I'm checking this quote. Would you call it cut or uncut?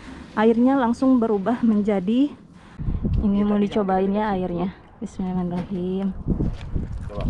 cut